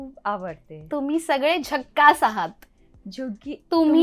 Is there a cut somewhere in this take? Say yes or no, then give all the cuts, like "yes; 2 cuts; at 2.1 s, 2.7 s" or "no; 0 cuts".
no; 0 cuts